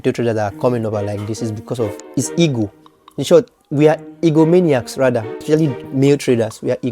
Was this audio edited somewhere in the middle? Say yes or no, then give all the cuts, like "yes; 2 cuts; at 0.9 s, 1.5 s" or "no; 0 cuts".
yes; 2 cuts; at 2.0 s, 5.4 s